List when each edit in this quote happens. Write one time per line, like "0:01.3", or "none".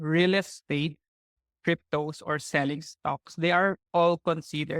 0:01.4